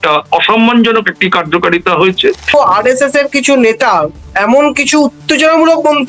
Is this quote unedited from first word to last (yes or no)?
no